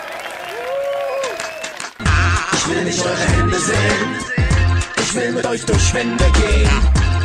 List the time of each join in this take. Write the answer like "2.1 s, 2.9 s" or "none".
1.8 s